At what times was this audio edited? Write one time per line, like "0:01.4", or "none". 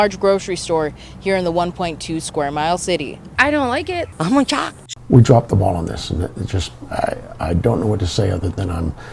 0:04.8